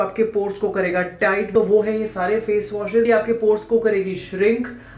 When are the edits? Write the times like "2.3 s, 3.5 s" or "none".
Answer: 1.5 s, 3.1 s